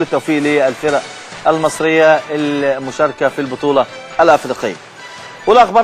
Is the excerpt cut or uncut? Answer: cut